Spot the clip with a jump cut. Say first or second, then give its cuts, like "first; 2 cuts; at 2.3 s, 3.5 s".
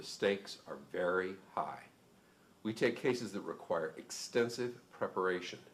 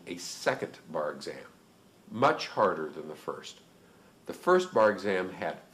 second; 1 cut; at 4.7 s